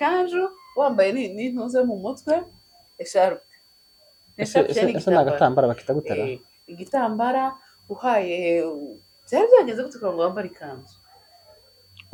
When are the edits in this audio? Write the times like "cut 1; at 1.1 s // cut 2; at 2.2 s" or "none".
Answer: none